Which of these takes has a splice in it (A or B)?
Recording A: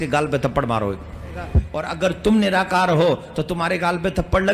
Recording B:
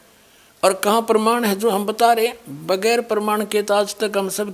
A